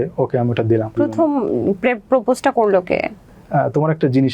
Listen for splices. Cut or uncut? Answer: cut